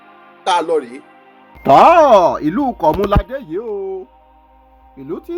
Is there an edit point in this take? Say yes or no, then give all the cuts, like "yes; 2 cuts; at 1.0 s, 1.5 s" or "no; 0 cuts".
yes; 1 cut; at 1.4 s